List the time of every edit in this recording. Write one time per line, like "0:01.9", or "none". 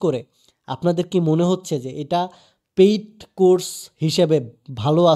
none